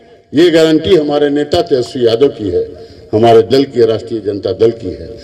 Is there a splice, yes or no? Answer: no